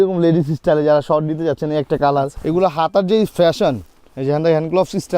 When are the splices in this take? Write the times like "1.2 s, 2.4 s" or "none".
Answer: 2.4 s